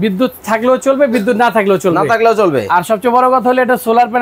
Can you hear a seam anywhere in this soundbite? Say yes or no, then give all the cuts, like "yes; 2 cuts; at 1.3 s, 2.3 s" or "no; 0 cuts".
no; 0 cuts